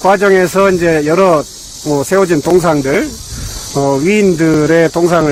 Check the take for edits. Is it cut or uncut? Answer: uncut